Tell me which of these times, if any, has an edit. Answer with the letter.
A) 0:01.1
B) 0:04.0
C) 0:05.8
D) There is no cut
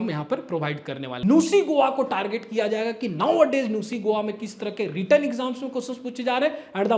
A